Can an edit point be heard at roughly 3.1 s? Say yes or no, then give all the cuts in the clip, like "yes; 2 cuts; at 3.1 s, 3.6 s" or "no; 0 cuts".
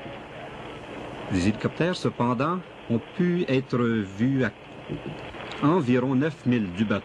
yes; 1 cut; at 3.1 s